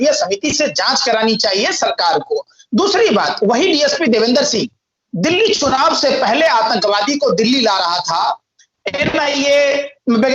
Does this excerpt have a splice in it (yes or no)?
no